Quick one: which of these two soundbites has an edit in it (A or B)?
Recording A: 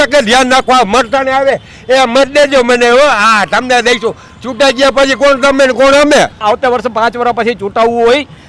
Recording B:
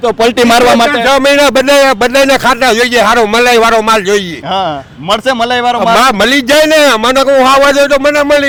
A